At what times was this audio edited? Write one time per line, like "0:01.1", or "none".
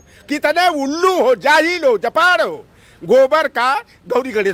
none